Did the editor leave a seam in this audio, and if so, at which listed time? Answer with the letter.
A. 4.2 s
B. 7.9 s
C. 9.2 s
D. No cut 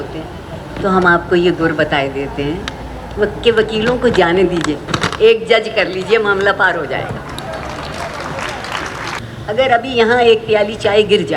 C